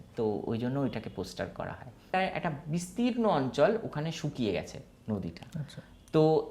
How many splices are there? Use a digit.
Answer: 1